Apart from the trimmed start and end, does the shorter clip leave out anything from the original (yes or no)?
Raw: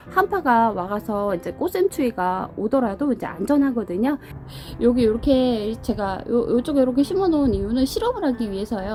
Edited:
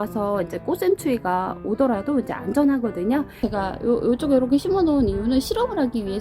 yes